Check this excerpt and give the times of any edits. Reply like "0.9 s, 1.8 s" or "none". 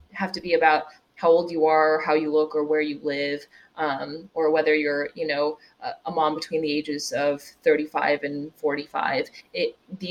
none